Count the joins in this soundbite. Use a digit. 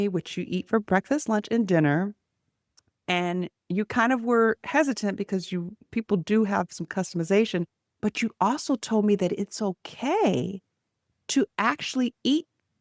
0